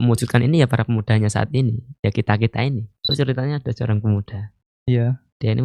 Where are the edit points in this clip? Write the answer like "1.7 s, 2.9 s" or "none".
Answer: 3.0 s